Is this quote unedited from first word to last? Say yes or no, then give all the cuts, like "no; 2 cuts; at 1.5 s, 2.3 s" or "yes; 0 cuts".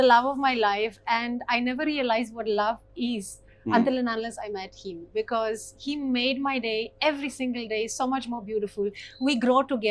yes; 0 cuts